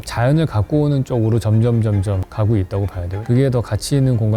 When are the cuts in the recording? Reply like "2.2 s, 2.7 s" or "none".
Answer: 3.1 s